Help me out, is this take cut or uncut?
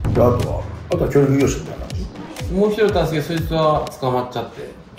uncut